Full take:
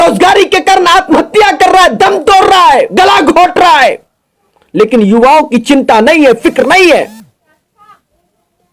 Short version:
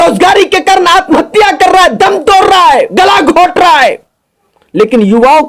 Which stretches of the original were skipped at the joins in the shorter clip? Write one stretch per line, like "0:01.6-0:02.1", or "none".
none